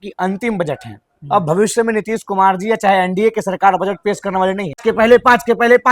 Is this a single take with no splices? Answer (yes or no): no